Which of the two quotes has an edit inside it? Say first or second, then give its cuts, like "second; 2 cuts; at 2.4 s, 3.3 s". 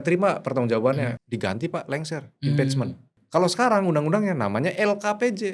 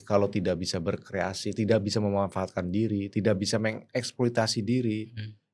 first; 2 cuts; at 1.1 s, 3.1 s